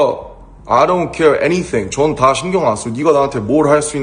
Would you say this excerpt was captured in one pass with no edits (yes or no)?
no